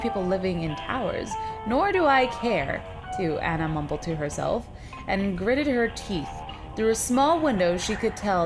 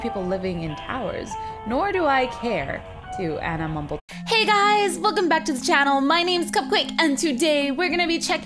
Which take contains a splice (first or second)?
first